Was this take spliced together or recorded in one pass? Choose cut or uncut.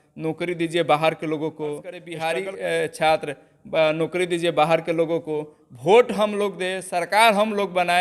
cut